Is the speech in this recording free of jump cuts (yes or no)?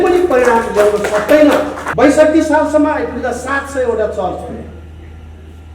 no